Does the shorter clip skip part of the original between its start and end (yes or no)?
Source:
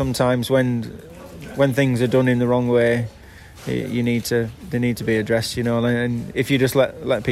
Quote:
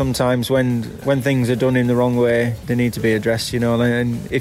yes